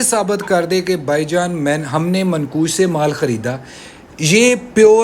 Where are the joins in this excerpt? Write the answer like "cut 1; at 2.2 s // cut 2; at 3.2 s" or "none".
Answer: none